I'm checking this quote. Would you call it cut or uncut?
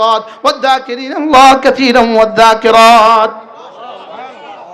uncut